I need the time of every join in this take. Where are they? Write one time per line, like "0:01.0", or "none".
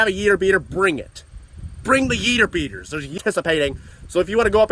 0:03.2